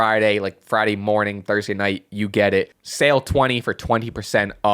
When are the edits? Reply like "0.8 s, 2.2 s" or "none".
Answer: 2.8 s